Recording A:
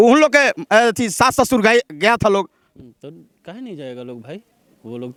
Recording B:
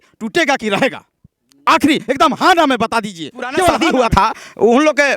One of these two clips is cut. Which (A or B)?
B